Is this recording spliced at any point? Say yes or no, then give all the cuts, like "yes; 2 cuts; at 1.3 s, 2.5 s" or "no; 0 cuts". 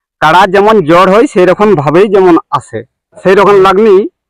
yes; 1 cut; at 3.2 s